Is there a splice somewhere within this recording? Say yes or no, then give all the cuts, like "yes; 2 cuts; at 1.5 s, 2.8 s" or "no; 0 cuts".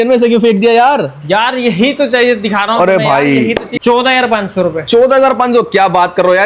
yes; 1 cut; at 3.7 s